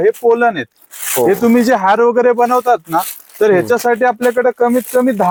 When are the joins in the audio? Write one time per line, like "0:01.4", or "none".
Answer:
none